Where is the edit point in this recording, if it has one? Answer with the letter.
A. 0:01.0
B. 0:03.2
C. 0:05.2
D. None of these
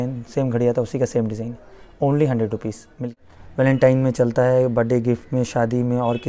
B